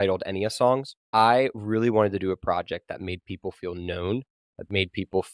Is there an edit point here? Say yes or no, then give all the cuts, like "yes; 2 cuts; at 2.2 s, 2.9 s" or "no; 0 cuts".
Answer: yes; 1 cut; at 1.0 s